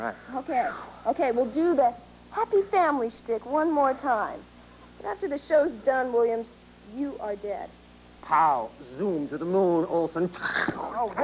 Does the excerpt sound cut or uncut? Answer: uncut